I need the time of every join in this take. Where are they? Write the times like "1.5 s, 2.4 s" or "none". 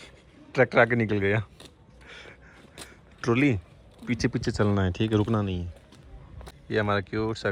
none